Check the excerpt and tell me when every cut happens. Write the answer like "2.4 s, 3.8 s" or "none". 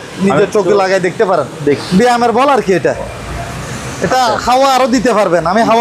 1.8 s